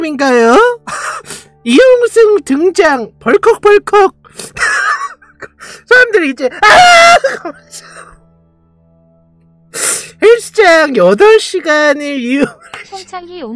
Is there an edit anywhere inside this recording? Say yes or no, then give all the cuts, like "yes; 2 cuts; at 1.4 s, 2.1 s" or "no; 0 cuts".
no; 0 cuts